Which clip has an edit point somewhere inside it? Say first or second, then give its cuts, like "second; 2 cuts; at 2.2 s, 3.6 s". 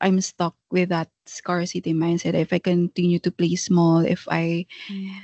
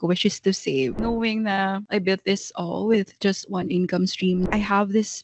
second; 3 cuts; at 1.0 s, 1.8 s, 4.4 s